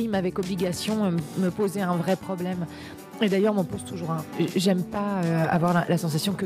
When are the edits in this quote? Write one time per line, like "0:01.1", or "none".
0:04.3